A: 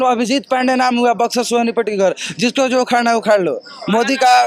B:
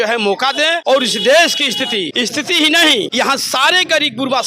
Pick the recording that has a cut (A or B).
B